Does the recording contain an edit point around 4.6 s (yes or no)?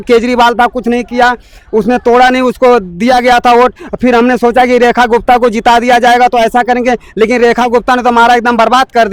no